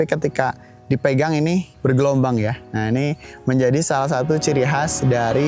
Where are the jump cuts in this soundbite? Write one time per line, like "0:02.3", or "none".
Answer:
0:01.7
0:02.6

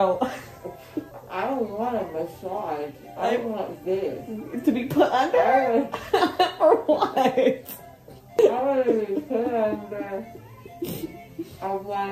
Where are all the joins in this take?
0:01.2
0:08.4

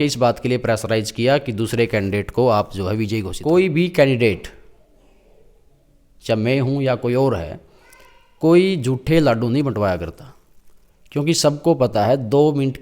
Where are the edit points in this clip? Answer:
0:03.3

